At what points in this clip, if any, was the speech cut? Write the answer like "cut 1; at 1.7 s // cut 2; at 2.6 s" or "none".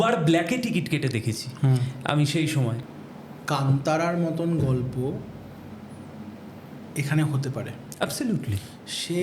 cut 1; at 2.8 s